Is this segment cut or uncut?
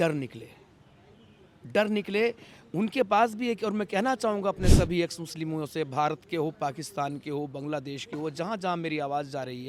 uncut